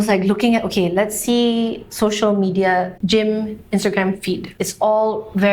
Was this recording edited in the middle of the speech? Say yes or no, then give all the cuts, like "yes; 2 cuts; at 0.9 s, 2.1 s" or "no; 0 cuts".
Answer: yes; 1 cut; at 4.5 s